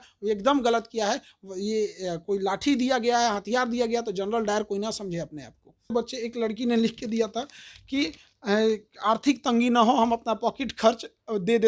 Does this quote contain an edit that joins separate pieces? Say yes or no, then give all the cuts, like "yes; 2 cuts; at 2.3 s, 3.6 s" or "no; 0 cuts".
yes; 1 cut; at 5.9 s